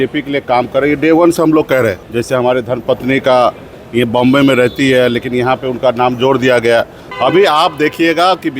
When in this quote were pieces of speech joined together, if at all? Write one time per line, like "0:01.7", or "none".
0:02.1
0:07.0